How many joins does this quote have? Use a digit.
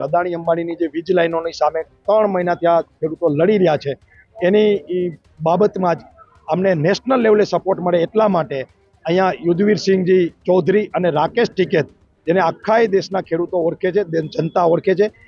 0